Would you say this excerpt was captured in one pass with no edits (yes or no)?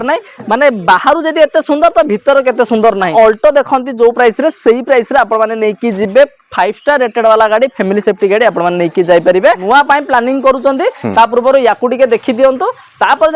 no